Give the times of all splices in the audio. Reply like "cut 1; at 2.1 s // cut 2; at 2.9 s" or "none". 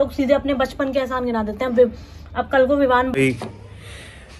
cut 1; at 3.2 s

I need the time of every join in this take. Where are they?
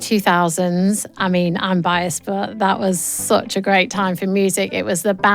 cut 1; at 1.1 s

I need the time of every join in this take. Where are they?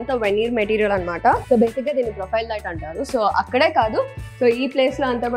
cut 1; at 1.4 s

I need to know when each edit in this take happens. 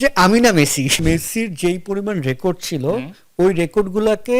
cut 1; at 1.0 s

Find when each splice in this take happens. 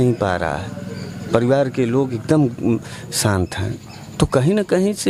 none

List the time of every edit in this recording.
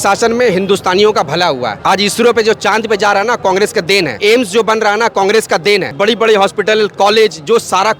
cut 1; at 1.7 s // cut 2; at 4.2 s // cut 3; at 5.9 s

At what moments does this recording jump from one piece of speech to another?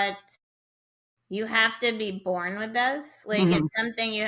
none

